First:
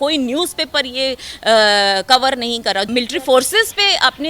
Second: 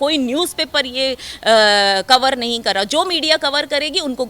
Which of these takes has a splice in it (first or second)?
first